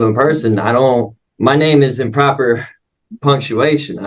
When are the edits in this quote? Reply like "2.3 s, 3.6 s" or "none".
1.2 s